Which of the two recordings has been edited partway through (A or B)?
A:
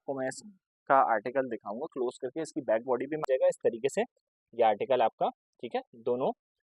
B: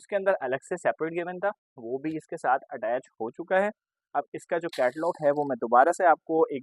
A